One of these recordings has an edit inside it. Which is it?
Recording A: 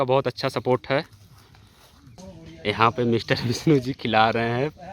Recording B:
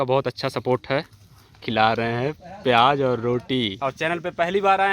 B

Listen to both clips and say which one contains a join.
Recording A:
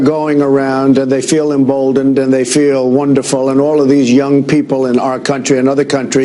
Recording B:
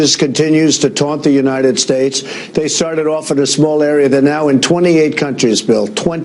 B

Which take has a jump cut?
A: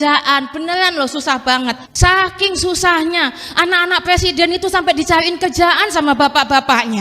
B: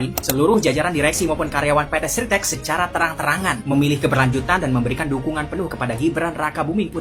A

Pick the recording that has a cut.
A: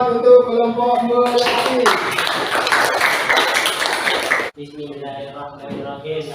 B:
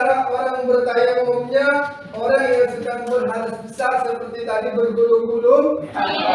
A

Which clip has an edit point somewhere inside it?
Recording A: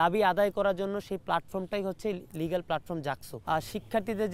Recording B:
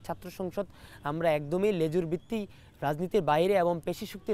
A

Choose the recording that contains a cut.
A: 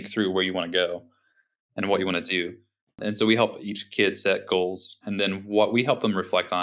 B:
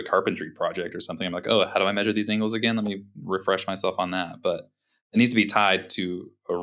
A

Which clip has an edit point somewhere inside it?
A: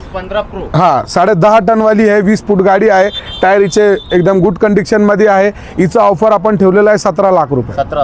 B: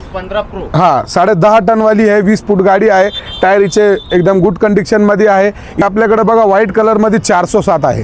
B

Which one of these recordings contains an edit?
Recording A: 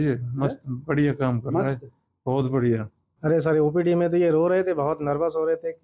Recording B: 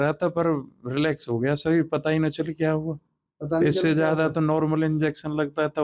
A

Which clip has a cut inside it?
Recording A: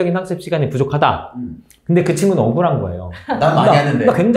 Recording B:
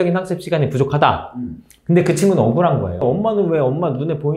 B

